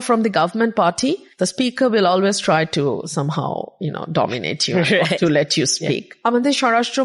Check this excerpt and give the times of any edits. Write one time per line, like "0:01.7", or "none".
0:01.3
0:06.1